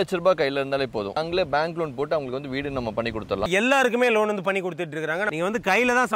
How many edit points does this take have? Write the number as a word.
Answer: three